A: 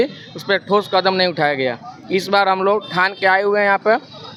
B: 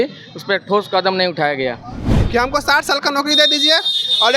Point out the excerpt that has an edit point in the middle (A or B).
B